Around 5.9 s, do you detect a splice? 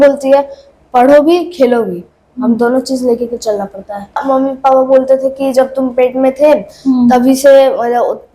no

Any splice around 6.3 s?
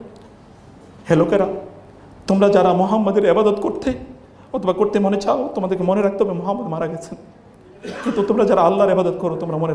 no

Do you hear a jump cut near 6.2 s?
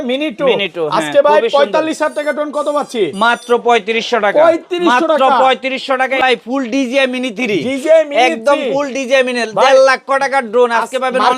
yes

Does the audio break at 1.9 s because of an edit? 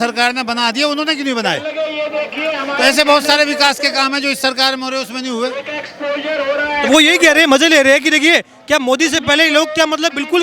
no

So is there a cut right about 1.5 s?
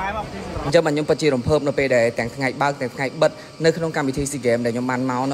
no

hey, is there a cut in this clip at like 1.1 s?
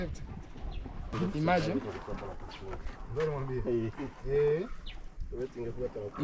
yes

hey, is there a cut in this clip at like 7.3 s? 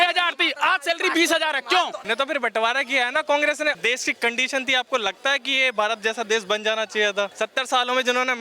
yes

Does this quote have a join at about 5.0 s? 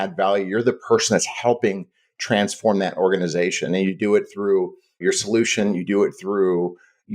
yes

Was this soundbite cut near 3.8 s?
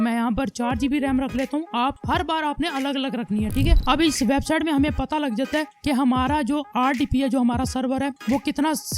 yes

